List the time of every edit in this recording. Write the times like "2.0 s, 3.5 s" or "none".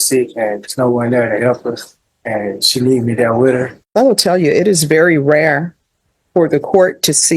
3.8 s

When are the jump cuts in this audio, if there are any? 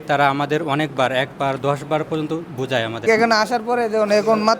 3.0 s

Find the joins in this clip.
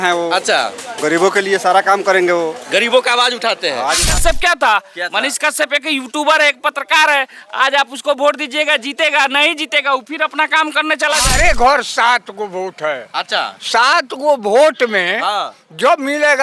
4.0 s, 11.3 s

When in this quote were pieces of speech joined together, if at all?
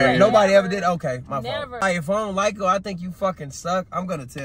1.8 s

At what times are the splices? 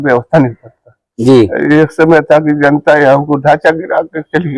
none

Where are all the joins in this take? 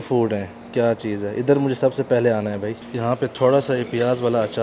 2.8 s

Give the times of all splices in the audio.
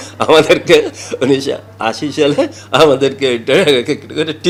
none

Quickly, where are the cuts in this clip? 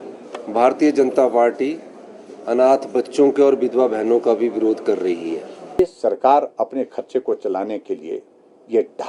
5.8 s

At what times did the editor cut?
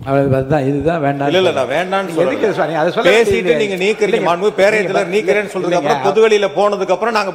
none

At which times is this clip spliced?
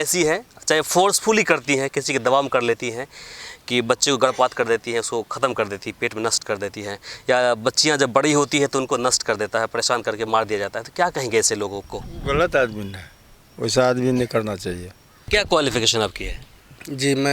15.3 s

